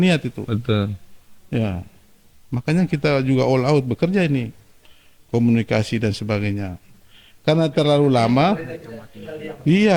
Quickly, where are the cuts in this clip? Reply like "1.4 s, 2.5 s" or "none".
none